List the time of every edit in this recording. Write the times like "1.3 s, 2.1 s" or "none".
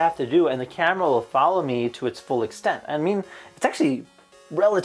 none

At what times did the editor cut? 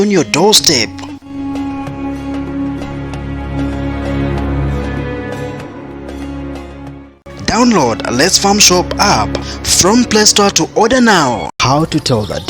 11.5 s

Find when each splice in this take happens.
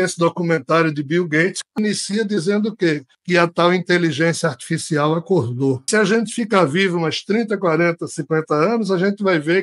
5.9 s

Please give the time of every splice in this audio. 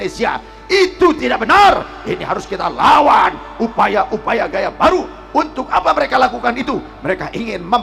none

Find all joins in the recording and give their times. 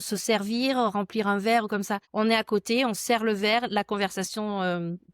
2.0 s

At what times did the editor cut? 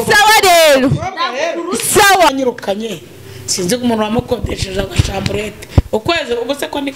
2.3 s

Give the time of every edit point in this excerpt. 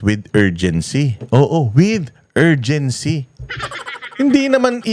none

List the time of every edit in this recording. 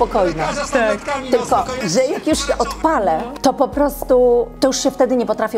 1.8 s, 3.3 s, 4.5 s

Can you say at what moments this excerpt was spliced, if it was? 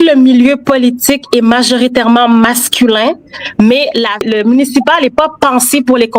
4.3 s

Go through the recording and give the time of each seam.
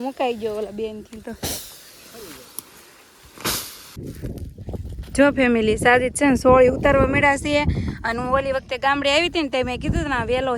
3.9 s

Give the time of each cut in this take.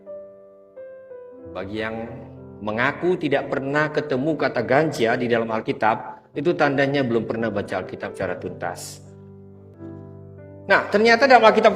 9.7 s

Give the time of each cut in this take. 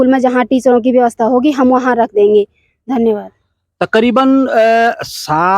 none

